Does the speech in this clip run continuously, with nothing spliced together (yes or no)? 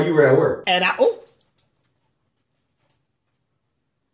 yes